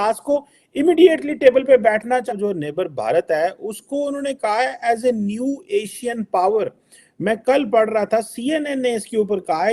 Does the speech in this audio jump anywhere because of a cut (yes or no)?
yes